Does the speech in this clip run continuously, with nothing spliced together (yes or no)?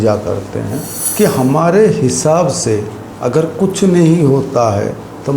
no